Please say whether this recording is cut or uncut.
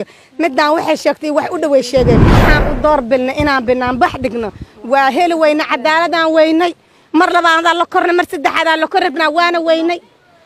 cut